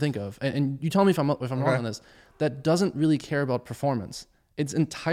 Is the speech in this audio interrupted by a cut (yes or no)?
no